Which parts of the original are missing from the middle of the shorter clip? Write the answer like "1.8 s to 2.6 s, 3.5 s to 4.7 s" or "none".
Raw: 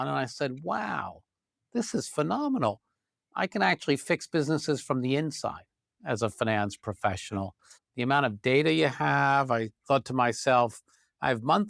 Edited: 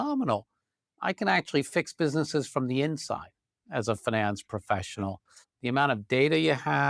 none